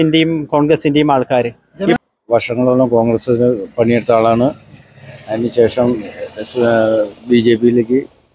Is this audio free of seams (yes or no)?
no